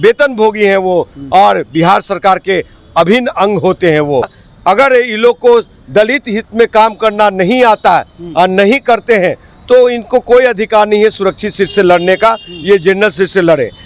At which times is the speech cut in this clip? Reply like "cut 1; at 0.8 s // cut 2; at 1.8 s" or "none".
cut 1; at 4.4 s